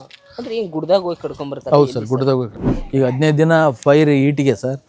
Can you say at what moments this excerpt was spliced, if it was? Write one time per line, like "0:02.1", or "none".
0:02.5

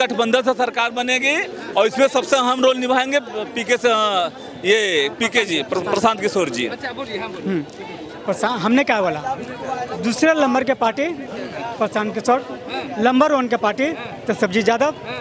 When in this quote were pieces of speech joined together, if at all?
none

